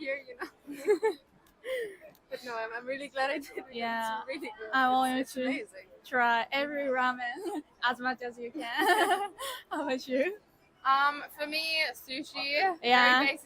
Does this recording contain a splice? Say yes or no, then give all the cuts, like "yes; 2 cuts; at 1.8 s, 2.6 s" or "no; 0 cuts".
no; 0 cuts